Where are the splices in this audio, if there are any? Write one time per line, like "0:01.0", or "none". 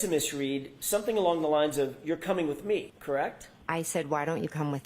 0:02.9